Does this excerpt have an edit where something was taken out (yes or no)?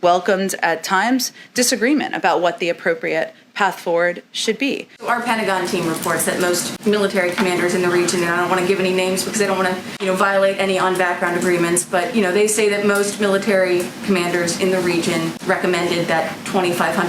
yes